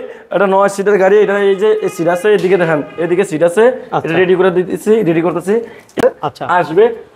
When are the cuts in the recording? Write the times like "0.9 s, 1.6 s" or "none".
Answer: 6.0 s